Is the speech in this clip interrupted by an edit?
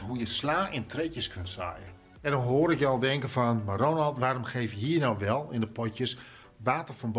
yes; 1 cut; at 1.9 s

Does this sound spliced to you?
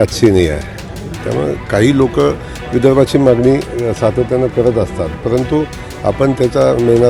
no; 0 cuts

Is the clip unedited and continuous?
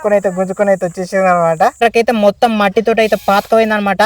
no; 1 cut; at 1.8 s

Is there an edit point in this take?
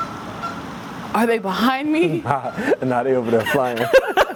no; 0 cuts

